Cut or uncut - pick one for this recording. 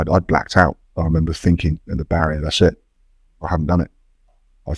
uncut